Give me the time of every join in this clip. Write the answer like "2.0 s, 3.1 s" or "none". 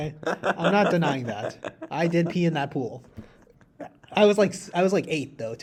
none